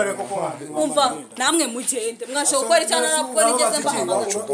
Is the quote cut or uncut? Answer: uncut